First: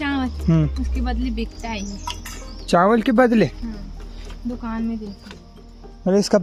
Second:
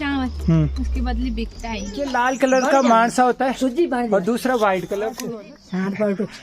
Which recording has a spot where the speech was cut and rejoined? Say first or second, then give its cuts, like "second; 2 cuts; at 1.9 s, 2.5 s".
second; 2 cuts; at 2.1 s, 5.2 s